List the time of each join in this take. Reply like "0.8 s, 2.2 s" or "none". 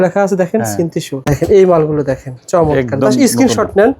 1.3 s